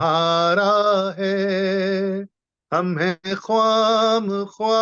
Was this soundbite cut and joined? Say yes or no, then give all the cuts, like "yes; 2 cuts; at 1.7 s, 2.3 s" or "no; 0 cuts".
no; 0 cuts